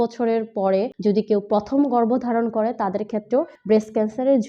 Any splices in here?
yes; 2 cuts; at 0.9 s, 3.6 s

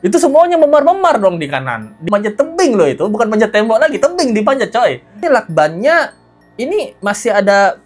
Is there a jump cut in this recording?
yes; 2 cuts; at 2.0 s, 5.2 s

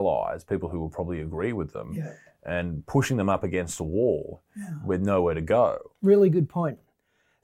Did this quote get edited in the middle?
yes; 1 cut; at 5.9 s

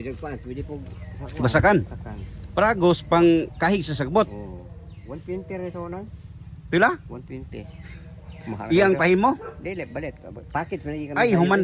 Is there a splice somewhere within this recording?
no; 0 cuts

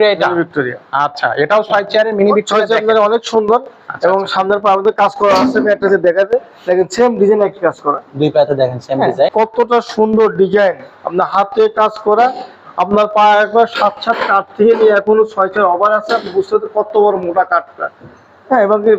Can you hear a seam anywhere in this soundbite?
yes; 1 cut; at 9.3 s

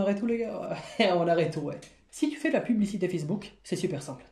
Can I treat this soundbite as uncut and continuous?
no; 1 cut; at 2.0 s

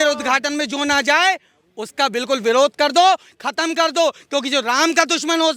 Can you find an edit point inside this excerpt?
no; 0 cuts

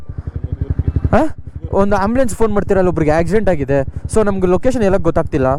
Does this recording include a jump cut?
no; 0 cuts

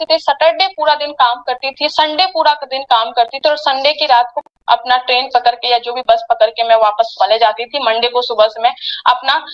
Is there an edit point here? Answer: no; 0 cuts

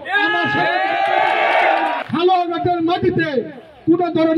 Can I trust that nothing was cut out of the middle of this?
no; 1 cut; at 2.0 s

